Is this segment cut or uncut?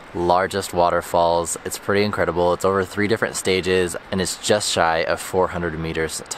uncut